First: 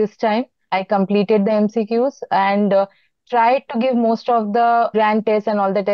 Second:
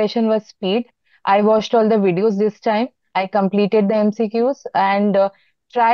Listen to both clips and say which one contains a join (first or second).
first